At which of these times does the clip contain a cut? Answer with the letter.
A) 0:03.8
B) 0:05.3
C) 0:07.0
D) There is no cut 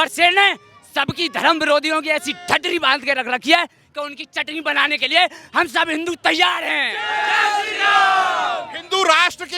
D